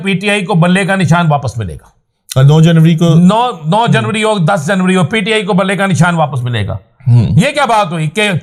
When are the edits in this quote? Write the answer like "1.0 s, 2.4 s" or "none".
none